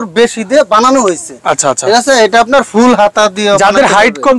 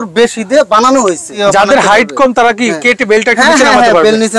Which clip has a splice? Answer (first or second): second